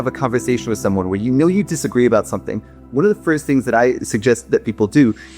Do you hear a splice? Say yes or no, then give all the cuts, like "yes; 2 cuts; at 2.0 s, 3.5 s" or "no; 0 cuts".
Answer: yes; 1 cut; at 4.0 s